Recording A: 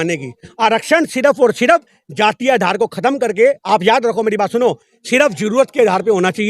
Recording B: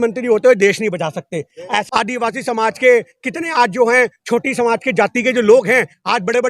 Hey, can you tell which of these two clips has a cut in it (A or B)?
B